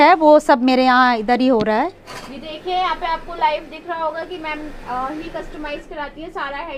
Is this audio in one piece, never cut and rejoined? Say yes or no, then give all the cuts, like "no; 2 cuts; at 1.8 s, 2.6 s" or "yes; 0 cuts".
yes; 0 cuts